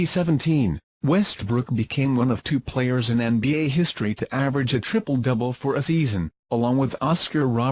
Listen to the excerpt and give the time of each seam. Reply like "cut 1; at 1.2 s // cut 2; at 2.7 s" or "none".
cut 1; at 2.7 s